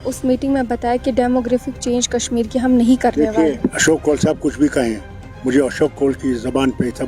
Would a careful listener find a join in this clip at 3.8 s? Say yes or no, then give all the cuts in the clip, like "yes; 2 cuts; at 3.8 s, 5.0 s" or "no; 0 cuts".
yes; 1 cut; at 3.8 s